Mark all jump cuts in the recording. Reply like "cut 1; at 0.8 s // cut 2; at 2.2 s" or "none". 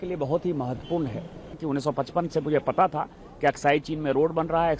cut 1; at 1.6 s